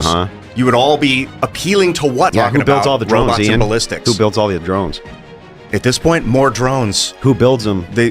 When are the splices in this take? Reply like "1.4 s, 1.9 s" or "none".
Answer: 2.3 s